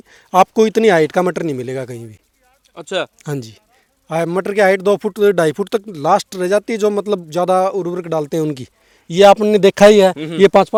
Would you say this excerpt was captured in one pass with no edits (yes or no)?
yes